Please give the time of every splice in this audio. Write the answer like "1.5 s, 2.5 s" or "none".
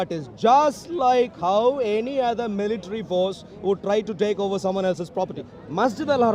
5.4 s